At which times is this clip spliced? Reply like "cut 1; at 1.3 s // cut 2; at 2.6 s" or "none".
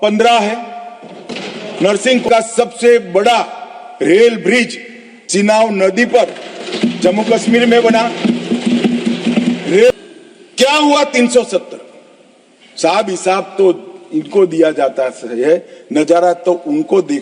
cut 1; at 2.3 s // cut 2; at 9.9 s